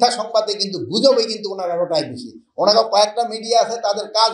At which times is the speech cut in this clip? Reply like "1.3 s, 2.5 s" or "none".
none

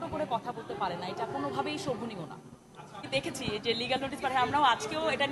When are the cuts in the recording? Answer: 3.0 s

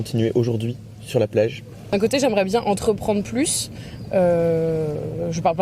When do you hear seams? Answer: 1.7 s

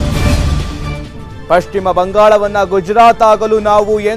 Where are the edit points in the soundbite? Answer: 1.4 s

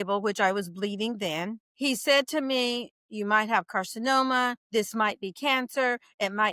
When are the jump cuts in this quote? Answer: 1.6 s, 4.6 s

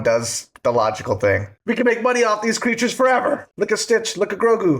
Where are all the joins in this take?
1.5 s, 3.5 s

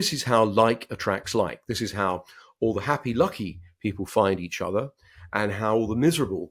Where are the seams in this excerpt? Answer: none

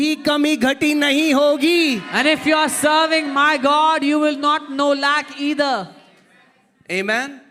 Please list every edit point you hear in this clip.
none

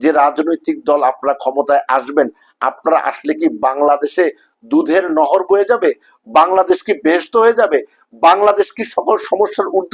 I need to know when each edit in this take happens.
none

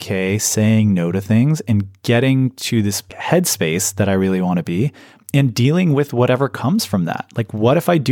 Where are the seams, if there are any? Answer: 3.2 s

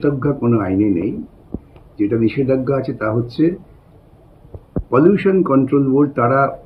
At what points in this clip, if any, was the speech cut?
none

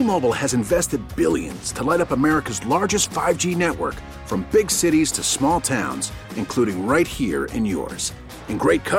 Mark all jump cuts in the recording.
none

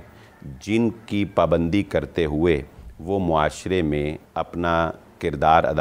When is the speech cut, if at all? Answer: 4.2 s

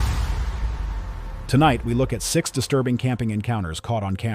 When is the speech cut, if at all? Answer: 1.4 s

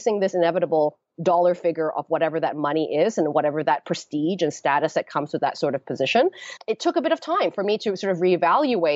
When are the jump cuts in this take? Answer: 6.6 s

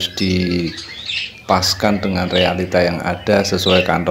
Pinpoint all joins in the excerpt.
none

